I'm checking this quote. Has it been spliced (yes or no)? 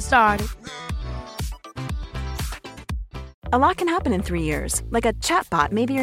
yes